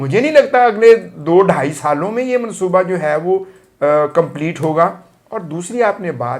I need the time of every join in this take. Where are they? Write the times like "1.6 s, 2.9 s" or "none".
none